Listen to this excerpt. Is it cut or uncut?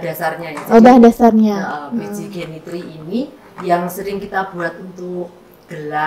uncut